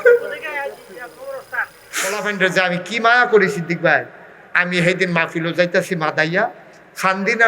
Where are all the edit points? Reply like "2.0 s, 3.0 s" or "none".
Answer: 2.1 s